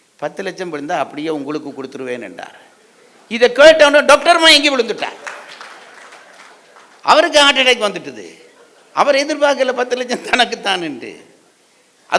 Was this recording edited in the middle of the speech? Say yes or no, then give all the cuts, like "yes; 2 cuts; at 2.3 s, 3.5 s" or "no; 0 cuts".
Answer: no; 0 cuts